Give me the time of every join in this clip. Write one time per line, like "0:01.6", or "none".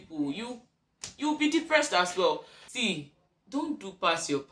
0:02.6